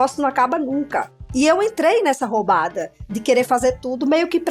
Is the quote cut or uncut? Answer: cut